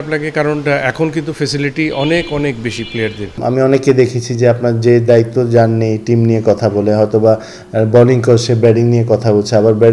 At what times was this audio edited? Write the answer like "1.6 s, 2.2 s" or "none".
3.3 s